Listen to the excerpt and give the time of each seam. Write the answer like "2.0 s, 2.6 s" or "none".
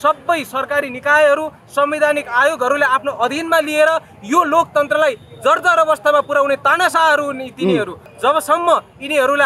8.0 s